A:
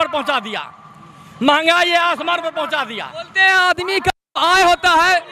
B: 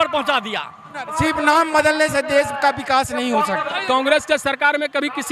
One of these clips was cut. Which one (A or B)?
B